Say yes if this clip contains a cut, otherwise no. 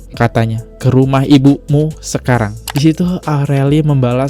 yes